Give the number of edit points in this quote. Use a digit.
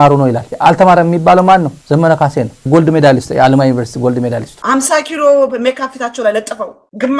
1